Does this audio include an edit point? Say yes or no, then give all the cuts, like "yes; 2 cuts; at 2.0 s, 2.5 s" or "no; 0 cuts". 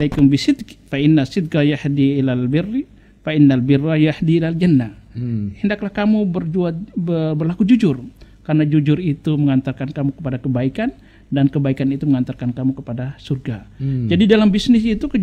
no; 0 cuts